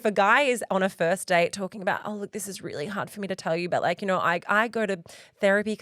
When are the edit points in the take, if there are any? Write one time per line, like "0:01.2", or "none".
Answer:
none